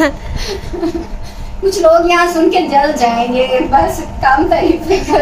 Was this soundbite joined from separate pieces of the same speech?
no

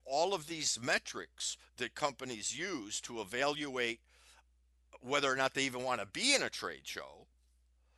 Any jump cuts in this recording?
no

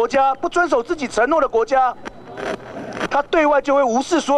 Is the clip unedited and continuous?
yes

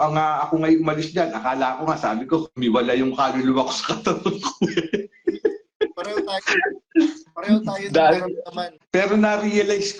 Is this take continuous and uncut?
no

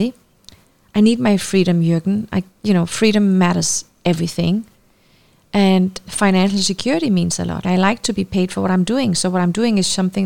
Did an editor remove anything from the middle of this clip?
yes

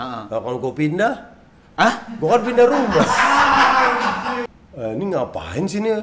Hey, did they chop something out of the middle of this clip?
yes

